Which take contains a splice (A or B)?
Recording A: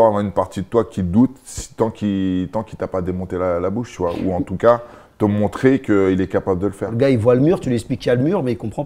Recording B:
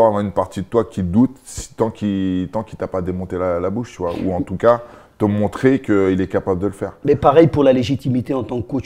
A